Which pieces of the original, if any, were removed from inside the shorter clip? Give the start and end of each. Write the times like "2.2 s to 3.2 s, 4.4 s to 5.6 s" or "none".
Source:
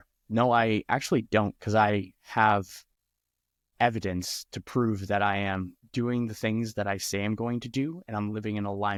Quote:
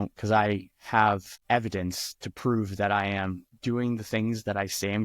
2.8 s to 3.6 s